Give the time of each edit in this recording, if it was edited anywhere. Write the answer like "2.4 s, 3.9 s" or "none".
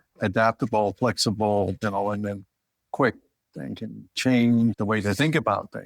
4.8 s